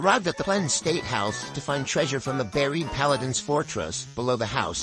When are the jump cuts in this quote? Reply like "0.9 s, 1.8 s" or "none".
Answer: 1.9 s